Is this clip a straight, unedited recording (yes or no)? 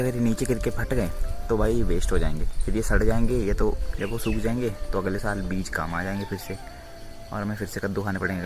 no